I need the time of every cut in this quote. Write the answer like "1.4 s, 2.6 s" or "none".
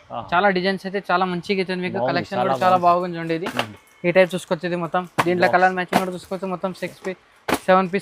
none